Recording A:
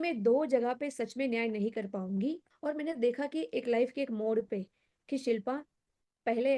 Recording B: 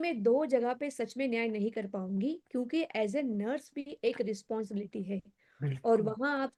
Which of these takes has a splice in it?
A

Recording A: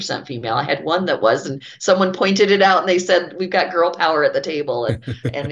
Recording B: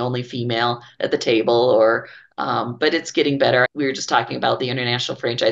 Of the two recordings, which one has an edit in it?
B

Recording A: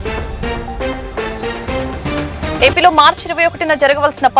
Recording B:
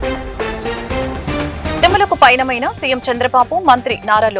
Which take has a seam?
B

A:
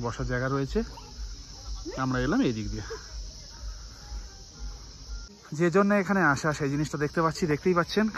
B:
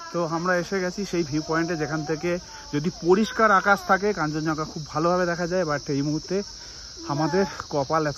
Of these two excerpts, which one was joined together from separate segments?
A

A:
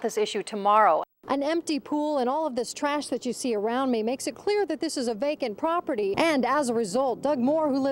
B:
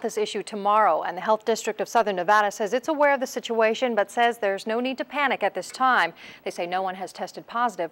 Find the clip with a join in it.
A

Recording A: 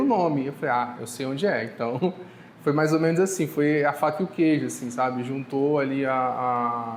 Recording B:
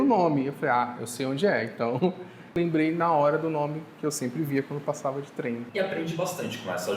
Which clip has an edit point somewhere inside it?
B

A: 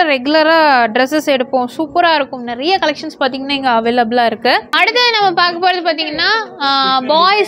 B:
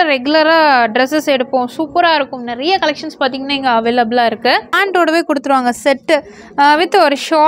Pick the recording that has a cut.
B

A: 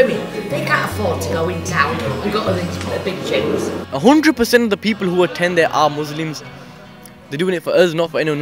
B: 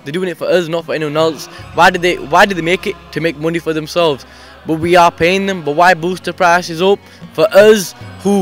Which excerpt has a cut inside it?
A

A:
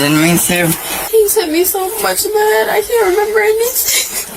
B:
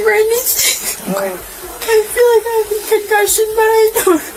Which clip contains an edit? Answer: A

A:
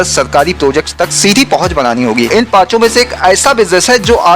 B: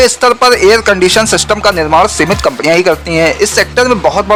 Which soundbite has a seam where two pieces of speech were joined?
A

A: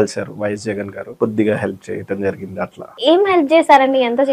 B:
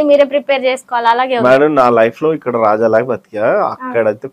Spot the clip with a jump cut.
A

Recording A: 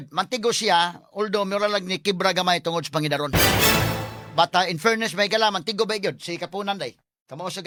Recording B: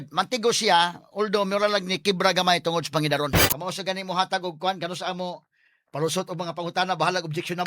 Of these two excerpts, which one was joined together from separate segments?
B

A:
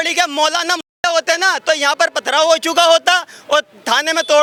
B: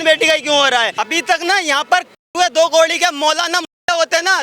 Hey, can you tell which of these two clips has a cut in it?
B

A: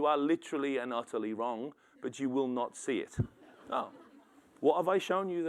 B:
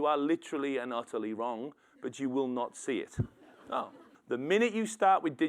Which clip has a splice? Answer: B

